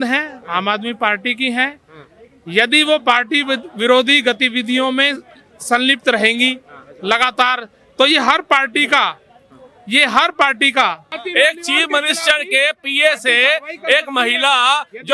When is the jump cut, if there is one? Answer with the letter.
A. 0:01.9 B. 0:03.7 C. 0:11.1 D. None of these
C